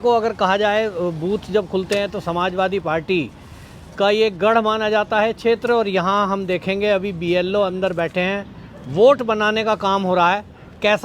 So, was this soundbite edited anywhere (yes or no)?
no